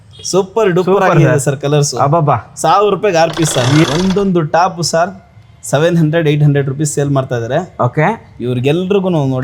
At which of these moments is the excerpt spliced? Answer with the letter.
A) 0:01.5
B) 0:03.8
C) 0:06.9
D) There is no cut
B